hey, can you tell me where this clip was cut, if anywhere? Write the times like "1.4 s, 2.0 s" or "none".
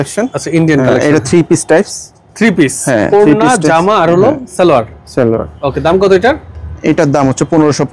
none